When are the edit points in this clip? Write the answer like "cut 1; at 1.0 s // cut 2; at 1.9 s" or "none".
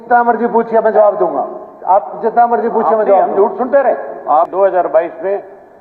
cut 1; at 4.5 s